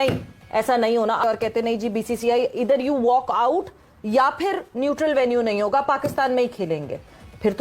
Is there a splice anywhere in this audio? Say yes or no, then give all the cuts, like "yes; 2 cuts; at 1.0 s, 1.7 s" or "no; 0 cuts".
yes; 1 cut; at 1.2 s